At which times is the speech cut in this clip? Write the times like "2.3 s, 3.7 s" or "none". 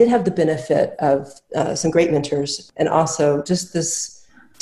2.6 s